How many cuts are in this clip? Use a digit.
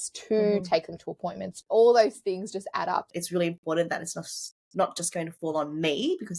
1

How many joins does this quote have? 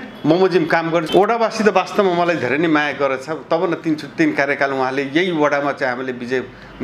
1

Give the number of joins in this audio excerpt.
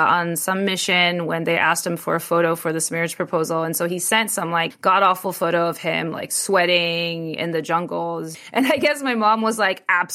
0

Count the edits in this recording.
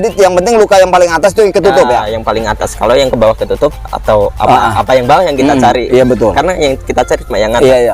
0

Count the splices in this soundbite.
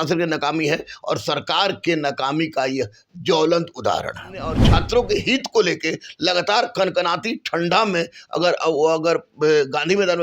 1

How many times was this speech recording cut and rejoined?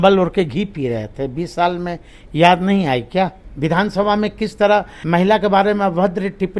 2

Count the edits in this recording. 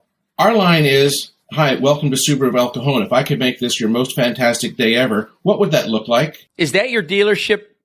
0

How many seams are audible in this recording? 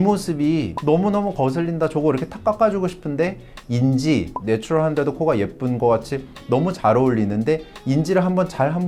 0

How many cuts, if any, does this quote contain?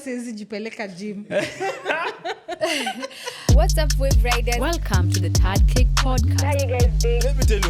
1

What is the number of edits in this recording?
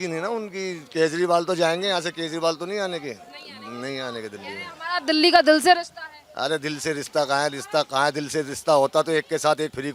0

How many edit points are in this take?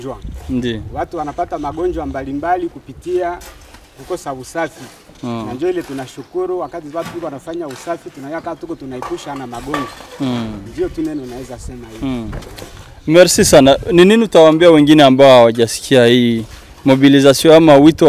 0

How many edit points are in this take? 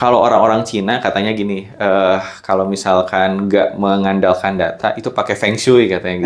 0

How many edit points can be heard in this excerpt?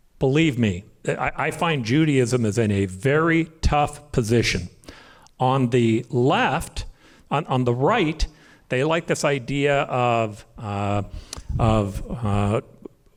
0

